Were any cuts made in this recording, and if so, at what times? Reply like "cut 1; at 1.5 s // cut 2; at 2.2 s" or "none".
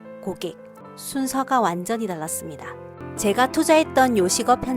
cut 1; at 1.0 s // cut 2; at 3.1 s